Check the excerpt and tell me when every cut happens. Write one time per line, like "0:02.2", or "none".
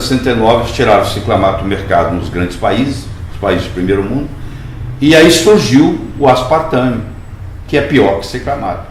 none